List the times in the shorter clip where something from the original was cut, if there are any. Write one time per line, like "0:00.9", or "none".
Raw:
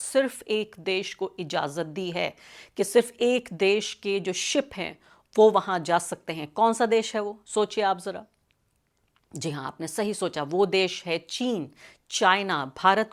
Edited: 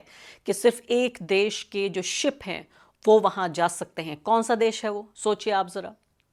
none